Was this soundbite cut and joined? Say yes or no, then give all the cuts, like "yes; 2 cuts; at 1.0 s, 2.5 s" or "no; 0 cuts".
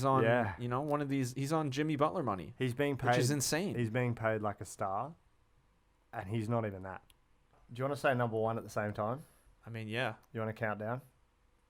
yes; 1 cut; at 7.6 s